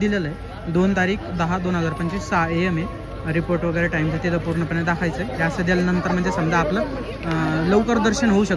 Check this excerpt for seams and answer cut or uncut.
uncut